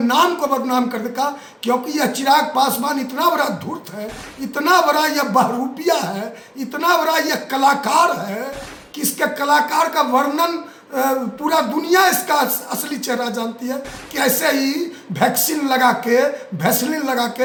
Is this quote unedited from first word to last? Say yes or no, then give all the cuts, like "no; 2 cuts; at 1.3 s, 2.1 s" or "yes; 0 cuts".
yes; 0 cuts